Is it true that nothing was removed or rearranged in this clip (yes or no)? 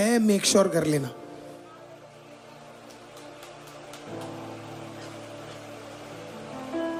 yes